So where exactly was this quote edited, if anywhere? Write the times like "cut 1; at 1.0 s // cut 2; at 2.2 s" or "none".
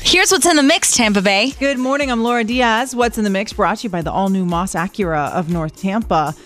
cut 1; at 1.5 s